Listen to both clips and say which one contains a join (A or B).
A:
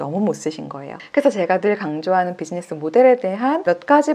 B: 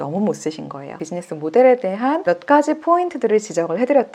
B